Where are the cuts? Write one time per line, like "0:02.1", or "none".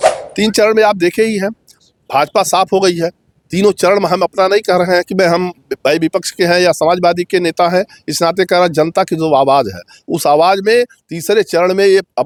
none

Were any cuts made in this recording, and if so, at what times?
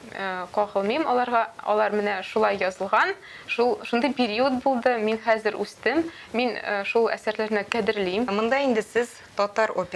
0:08.3

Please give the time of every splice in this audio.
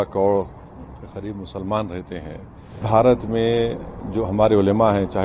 0:02.8

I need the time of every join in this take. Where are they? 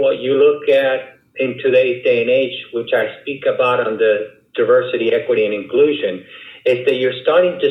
none

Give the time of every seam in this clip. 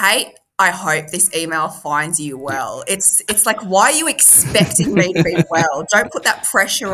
none

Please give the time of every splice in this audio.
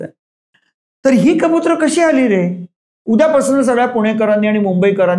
0:02.9

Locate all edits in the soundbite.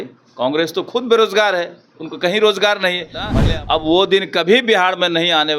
0:03.4

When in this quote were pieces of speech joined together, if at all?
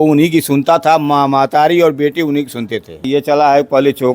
0:03.1

